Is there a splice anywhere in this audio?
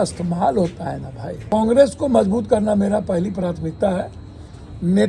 yes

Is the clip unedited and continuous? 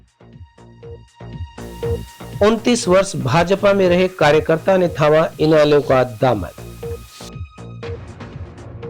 yes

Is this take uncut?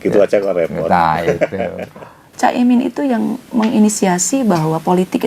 no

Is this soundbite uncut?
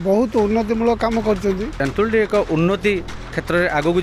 no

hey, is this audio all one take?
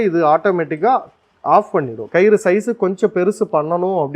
no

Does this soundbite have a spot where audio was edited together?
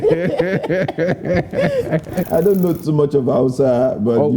yes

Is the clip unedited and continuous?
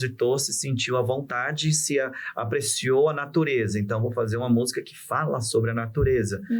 yes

